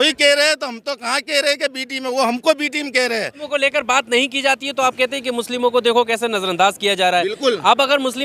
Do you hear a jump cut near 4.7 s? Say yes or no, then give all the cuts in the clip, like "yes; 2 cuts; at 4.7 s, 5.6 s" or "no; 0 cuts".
no; 1 cut; at 3.4 s